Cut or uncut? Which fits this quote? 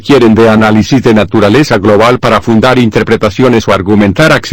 uncut